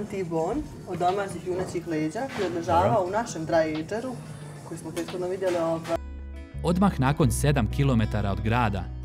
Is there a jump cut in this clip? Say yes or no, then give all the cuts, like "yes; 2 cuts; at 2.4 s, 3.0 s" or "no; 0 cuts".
yes; 1 cut; at 6.0 s